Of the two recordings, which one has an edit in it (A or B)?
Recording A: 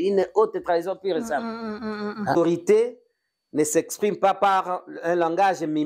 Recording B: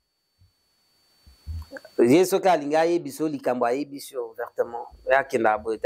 A